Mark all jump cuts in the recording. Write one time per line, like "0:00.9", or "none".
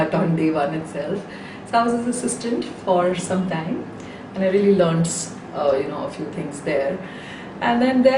0:01.3